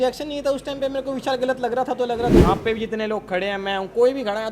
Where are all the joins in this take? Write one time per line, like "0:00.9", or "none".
0:02.3